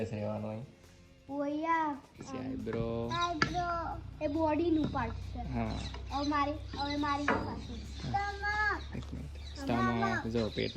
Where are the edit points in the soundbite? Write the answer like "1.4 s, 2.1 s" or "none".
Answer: 2.5 s